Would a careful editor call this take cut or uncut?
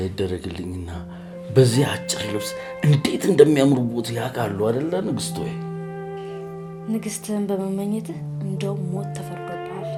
uncut